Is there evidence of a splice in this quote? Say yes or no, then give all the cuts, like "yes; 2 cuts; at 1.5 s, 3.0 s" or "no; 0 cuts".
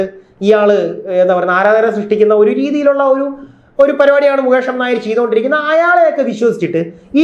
no; 0 cuts